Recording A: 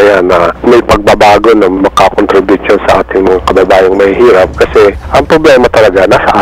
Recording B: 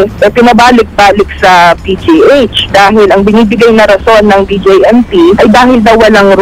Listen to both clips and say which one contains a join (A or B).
B